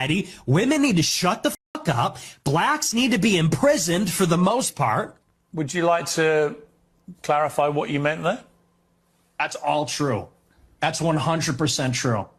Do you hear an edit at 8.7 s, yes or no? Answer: no